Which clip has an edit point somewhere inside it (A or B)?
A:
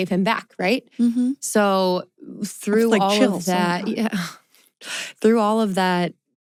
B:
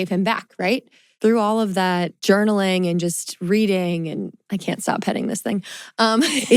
B